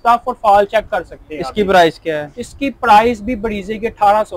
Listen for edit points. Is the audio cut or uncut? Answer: uncut